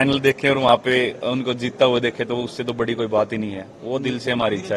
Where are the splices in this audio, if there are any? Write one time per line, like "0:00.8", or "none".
none